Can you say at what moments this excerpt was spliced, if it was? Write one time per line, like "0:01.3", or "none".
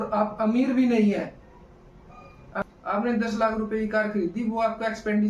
0:02.5